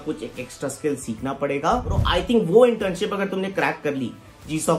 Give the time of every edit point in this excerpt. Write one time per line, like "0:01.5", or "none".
0:02.0

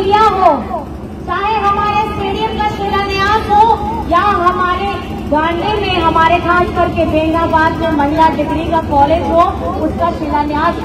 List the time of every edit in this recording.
none

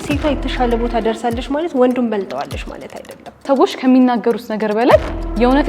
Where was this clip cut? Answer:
0:03.4

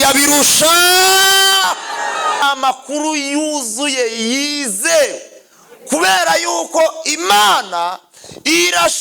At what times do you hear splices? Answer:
0:02.4

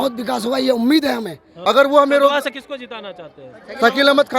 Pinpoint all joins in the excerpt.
0:01.4

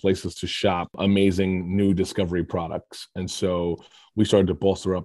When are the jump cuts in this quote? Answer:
0:01.0

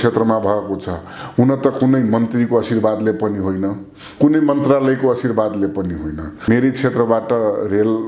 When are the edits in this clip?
0:06.5

